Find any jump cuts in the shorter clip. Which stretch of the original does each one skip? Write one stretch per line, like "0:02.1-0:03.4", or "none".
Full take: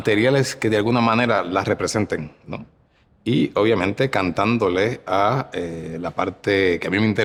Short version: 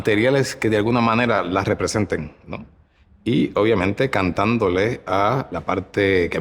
0:05.5-0:06.0